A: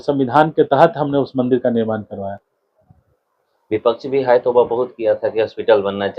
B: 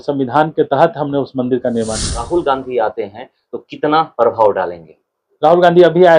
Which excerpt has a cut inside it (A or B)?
B